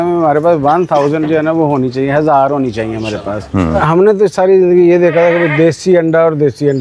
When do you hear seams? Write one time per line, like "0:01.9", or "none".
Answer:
0:03.8